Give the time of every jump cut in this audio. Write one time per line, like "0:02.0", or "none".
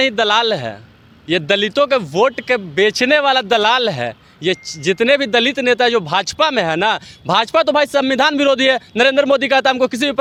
none